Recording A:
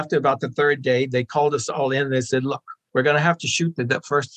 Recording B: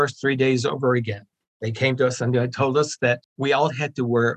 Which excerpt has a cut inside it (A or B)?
B